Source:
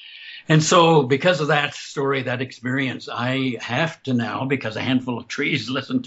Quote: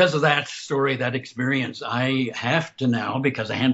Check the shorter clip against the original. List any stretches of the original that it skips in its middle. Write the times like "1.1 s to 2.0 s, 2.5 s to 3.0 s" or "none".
none